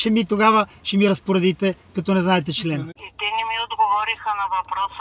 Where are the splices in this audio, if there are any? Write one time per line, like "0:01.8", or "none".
0:02.8